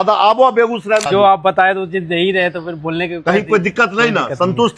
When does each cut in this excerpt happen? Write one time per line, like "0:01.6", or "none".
0:01.0